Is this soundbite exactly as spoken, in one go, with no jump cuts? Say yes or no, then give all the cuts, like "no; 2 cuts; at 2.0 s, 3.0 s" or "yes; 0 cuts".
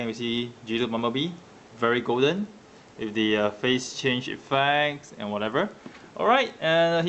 no; 1 cut; at 2.9 s